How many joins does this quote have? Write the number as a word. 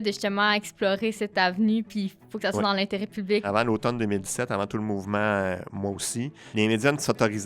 two